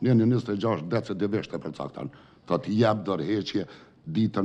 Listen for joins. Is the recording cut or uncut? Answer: uncut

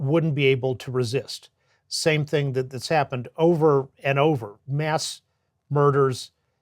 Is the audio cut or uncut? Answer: cut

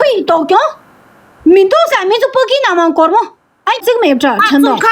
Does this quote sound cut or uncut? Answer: cut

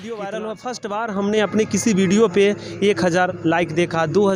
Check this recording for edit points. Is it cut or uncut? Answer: uncut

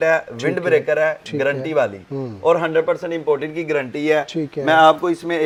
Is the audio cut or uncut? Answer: uncut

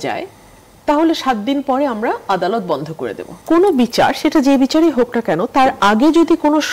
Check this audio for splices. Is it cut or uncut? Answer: cut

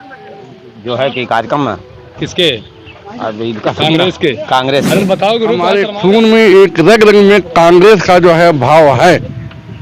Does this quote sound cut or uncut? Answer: cut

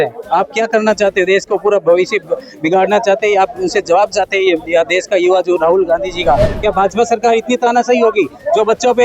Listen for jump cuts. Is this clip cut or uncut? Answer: cut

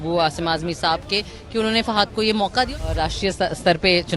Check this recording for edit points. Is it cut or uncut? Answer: cut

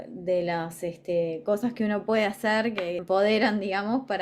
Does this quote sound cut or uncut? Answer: cut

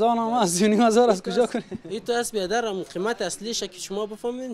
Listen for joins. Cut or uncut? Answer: uncut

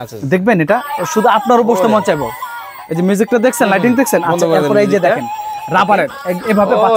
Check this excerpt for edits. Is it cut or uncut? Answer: uncut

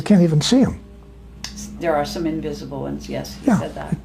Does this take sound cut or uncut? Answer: uncut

